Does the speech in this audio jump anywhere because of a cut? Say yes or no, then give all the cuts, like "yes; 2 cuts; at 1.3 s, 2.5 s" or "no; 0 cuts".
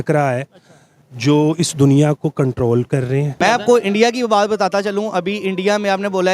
yes; 1 cut; at 3.4 s